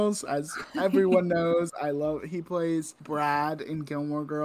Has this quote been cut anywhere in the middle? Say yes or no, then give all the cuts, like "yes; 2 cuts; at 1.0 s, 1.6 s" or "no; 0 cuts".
yes; 1 cut; at 3.0 s